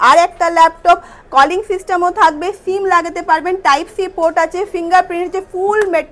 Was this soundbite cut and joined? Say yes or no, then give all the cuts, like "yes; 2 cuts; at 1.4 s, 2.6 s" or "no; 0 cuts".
no; 0 cuts